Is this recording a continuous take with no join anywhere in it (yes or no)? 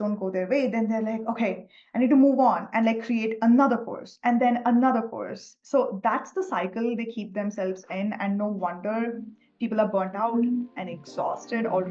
yes